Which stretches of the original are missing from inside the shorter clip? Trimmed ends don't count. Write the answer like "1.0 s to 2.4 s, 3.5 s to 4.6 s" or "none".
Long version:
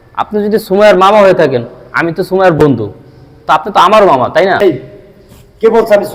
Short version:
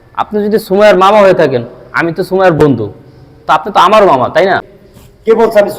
4.6 s to 4.9 s